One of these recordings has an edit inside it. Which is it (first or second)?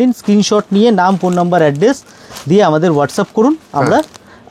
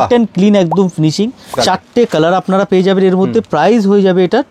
second